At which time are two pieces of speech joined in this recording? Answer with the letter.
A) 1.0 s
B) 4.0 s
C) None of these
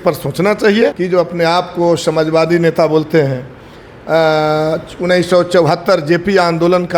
A